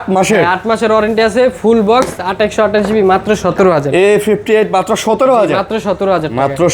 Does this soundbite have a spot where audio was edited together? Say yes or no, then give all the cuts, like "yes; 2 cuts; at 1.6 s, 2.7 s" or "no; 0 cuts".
no; 0 cuts